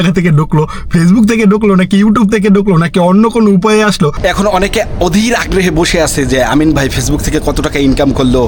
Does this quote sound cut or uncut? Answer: cut